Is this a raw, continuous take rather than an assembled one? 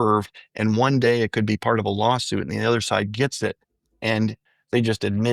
no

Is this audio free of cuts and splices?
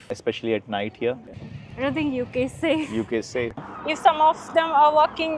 no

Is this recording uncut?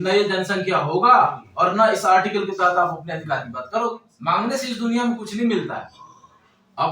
no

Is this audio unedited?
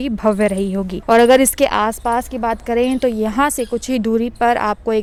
yes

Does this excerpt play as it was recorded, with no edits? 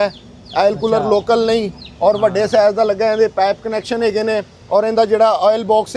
yes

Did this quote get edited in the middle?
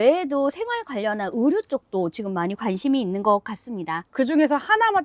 yes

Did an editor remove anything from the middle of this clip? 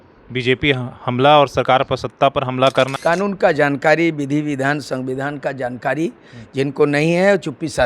yes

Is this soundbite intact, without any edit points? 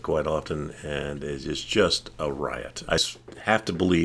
no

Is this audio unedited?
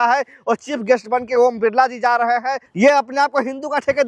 no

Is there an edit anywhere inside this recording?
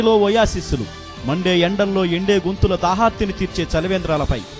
no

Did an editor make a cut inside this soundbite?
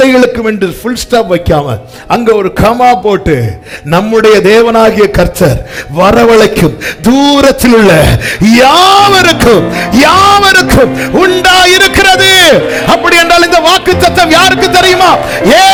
no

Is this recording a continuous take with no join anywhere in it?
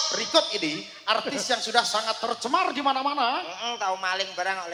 yes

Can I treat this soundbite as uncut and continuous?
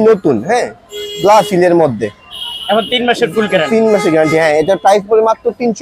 yes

